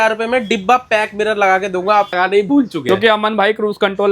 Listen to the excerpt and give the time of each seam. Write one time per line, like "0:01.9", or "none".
0:02.1